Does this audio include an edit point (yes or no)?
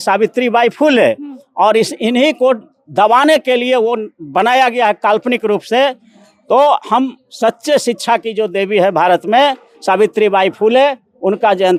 no